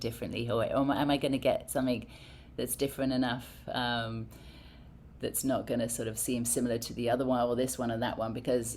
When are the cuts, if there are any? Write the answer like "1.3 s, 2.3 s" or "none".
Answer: none